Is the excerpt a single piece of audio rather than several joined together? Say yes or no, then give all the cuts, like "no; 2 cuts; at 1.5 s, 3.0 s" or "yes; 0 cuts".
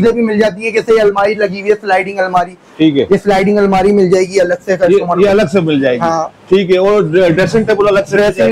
yes; 0 cuts